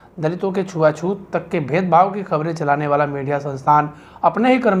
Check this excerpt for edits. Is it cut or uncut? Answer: uncut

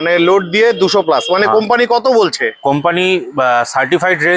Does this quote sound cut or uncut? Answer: uncut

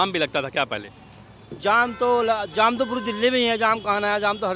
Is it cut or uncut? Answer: uncut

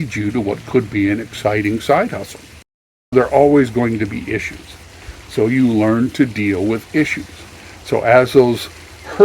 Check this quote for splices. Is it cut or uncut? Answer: cut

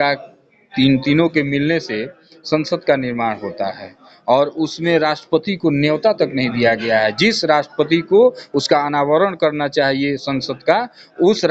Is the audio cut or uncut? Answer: uncut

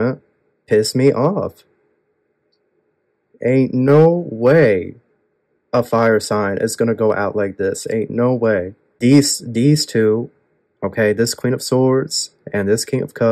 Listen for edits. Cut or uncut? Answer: cut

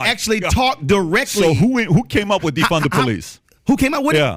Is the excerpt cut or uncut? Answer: uncut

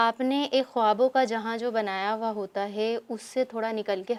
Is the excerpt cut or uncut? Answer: uncut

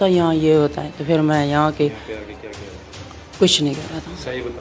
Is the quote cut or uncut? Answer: uncut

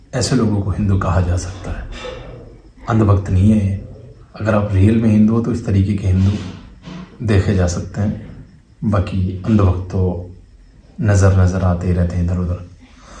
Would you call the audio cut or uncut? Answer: uncut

